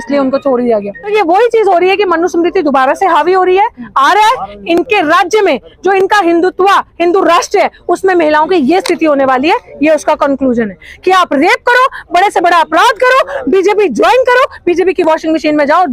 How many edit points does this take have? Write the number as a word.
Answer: one